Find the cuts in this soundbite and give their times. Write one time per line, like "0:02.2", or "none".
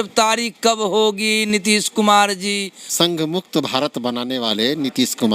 0:02.8